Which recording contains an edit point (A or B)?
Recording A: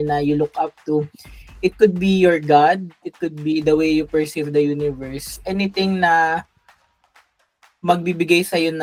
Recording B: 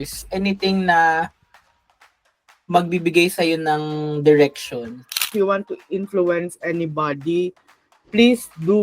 B